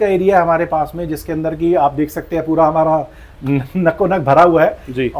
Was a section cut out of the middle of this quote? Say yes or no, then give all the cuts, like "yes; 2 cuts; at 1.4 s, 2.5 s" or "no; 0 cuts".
no; 0 cuts